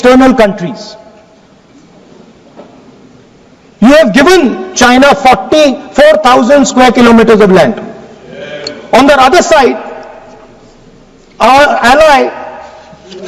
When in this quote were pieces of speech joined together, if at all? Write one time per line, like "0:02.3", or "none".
none